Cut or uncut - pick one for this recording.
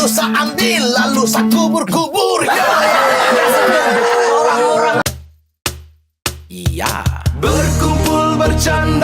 cut